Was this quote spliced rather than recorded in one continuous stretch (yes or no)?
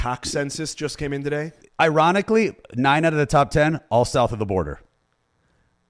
yes